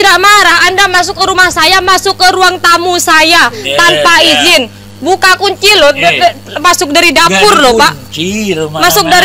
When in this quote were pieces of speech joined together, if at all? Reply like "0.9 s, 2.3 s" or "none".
none